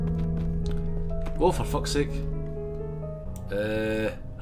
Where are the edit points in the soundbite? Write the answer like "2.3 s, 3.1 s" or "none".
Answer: 3.3 s